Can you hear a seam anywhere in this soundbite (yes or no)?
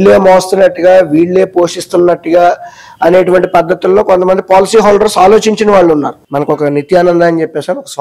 yes